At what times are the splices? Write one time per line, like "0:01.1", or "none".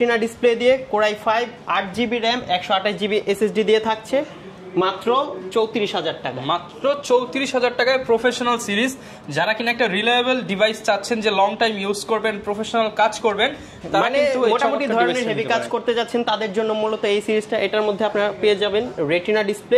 none